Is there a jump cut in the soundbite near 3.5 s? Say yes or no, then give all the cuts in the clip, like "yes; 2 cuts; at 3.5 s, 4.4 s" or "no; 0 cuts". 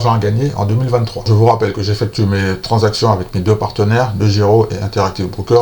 no; 1 cut; at 1.2 s